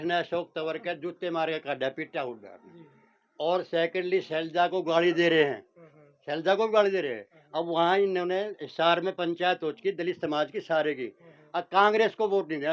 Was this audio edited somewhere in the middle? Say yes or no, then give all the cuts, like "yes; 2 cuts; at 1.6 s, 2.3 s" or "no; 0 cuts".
no; 0 cuts